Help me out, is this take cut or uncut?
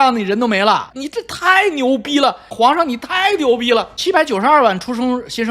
cut